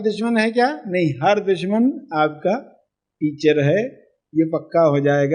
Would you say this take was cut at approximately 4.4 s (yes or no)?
no